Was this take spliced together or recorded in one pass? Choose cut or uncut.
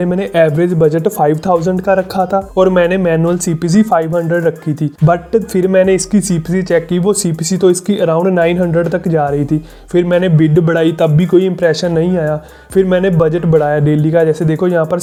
uncut